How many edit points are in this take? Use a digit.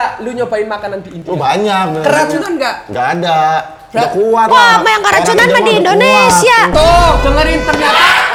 0